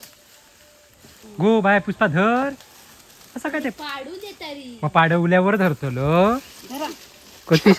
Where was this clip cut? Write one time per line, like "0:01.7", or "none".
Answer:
0:01.2